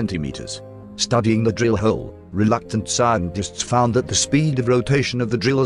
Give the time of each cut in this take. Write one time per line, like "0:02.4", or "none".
none